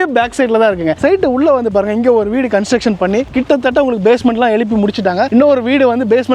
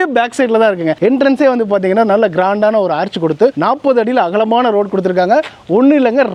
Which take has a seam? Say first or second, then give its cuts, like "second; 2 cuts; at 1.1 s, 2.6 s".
first; 2 cuts; at 1.0 s, 5.3 s